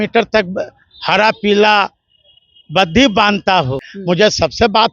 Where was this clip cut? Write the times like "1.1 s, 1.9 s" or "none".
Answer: 3.9 s